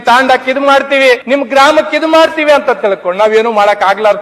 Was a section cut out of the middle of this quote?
yes; 1 cut; at 1.2 s

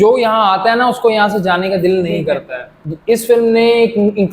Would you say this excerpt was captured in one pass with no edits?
no; 1 cut; at 3.1 s

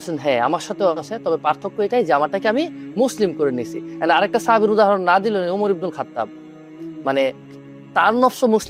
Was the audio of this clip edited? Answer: no; 0 cuts

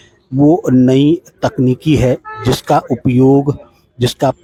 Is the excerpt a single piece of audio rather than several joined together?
yes; 0 cuts

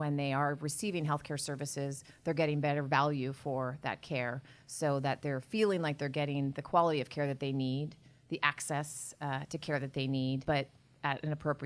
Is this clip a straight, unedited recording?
no; 1 cut; at 10.4 s

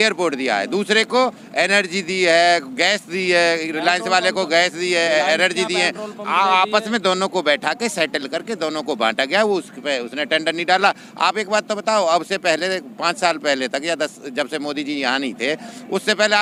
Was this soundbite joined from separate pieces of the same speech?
no; 0 cuts

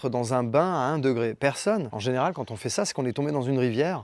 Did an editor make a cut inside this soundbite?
no; 0 cuts

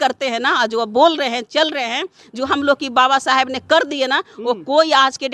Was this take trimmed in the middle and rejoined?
no; 0 cuts

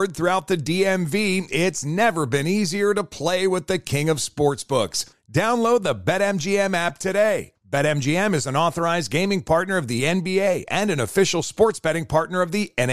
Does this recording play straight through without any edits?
yes; 0 cuts

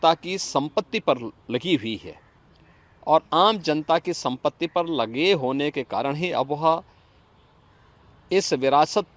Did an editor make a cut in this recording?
no; 0 cuts

